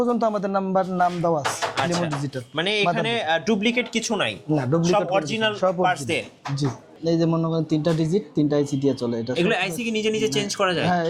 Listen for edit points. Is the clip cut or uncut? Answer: cut